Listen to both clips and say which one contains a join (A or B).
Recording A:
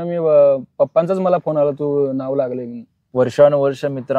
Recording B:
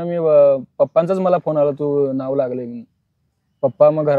A